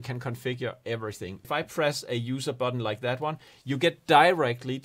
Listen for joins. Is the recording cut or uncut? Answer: cut